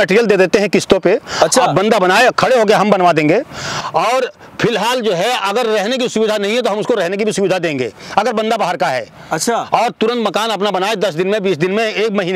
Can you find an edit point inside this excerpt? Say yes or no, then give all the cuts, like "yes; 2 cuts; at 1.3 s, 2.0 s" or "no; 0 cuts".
no; 0 cuts